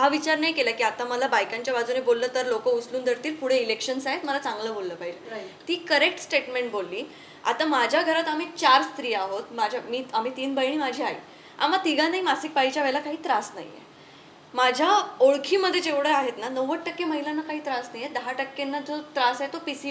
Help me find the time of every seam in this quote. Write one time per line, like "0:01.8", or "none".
none